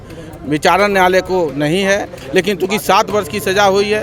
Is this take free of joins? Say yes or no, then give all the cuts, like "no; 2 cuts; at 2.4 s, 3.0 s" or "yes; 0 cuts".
no; 1 cut; at 2.2 s